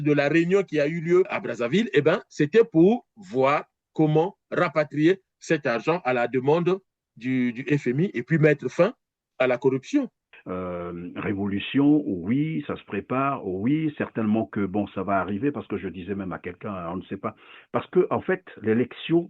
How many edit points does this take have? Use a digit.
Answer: 1